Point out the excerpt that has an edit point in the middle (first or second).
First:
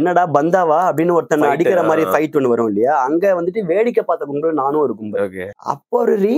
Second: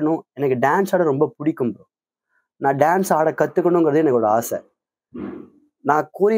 first